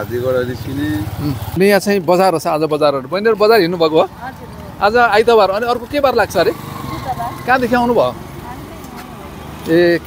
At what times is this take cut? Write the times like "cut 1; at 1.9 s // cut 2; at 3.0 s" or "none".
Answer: cut 1; at 1.4 s